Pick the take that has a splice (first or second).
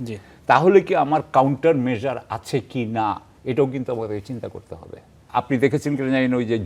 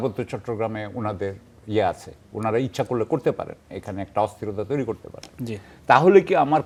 first